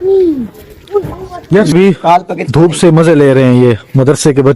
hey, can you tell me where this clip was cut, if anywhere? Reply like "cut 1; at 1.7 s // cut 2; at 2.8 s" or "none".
cut 1; at 1.7 s